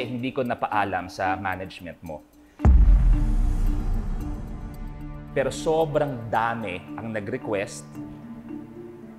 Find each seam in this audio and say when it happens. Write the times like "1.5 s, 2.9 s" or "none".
none